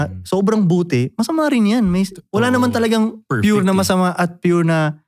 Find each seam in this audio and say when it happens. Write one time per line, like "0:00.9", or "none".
none

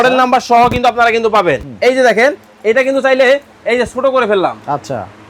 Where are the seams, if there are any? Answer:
0:01.7

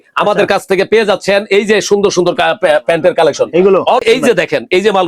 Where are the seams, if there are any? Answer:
0:04.0

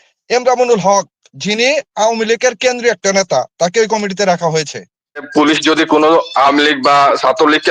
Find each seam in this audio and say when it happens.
0:05.3

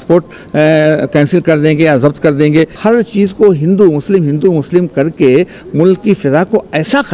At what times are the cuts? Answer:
0:02.7

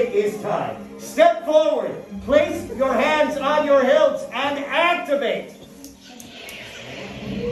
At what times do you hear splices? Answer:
none

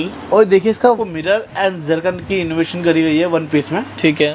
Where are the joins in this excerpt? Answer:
0:01.1

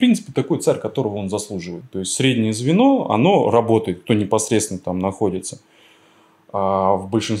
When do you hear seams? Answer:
0:01.8

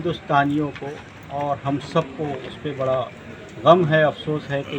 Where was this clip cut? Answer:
none

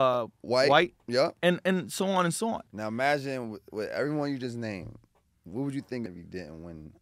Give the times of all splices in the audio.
0:01.4
0:02.7
0:06.1

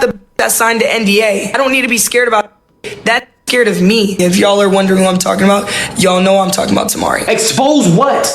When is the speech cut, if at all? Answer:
0:01.5
0:04.1
0:07.2

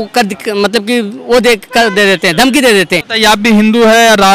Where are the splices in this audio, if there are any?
0:03.0

